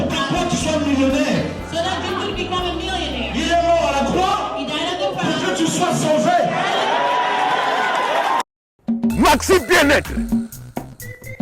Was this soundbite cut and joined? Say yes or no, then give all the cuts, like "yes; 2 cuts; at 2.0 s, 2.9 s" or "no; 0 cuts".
yes; 1 cut; at 8.8 s